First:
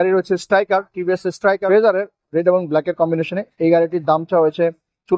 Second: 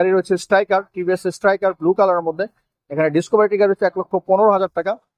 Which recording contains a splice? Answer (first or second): first